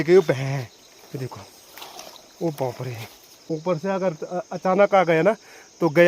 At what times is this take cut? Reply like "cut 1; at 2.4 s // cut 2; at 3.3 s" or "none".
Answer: cut 1; at 3.5 s